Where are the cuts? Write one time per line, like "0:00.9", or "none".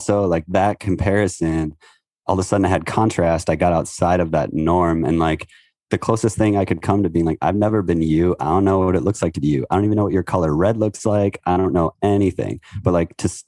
0:05.9